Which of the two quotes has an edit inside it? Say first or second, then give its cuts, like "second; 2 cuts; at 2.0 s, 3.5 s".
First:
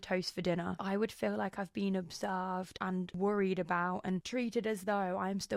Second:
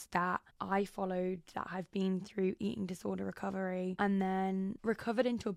first; 3 cuts; at 0.8 s, 3.1 s, 4.2 s